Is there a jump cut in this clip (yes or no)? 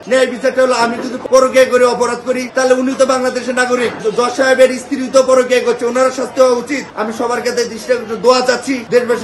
yes